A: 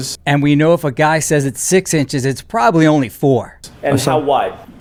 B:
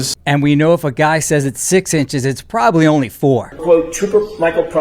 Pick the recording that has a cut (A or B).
B